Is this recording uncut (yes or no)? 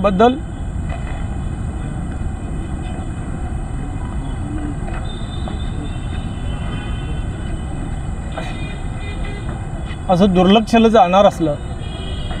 yes